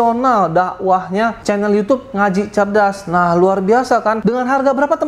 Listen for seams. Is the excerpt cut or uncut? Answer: cut